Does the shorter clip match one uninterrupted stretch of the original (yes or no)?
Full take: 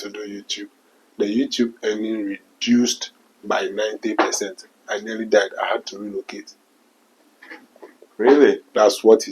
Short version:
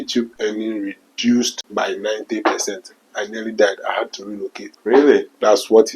no